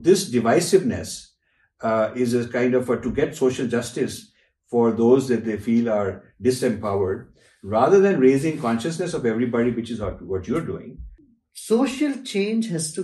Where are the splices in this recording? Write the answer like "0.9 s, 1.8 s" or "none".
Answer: 11.1 s